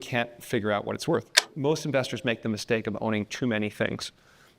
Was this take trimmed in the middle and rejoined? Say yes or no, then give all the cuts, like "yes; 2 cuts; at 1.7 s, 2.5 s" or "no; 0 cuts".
yes; 1 cut; at 1.5 s